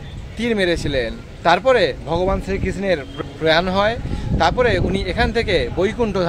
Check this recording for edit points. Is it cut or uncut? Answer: cut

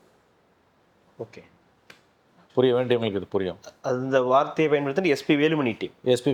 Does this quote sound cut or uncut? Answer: uncut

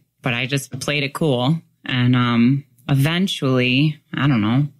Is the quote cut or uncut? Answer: uncut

